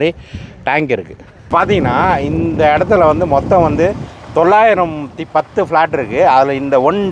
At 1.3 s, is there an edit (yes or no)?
yes